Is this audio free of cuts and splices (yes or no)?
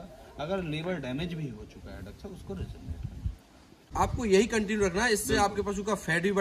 no